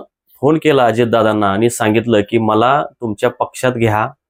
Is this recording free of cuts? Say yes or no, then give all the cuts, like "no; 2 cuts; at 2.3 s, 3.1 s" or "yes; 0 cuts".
yes; 0 cuts